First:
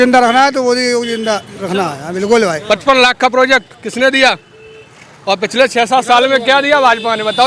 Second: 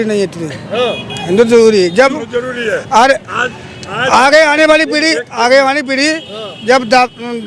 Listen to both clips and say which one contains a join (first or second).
first